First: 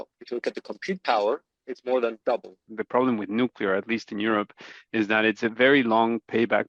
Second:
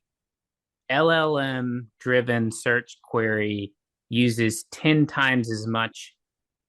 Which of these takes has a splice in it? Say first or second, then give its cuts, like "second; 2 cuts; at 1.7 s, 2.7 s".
first; 1 cut; at 2.7 s